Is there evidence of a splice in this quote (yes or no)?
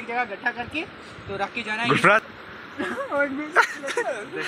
yes